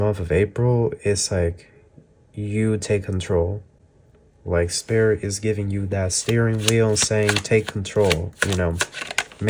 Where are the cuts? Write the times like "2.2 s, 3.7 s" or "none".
none